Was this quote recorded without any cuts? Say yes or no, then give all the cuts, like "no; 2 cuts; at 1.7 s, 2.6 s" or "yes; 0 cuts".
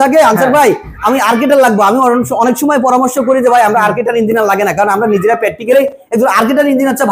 yes; 0 cuts